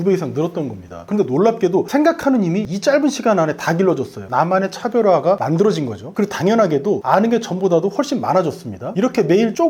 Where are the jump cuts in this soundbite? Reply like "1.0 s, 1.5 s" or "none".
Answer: 1.0 s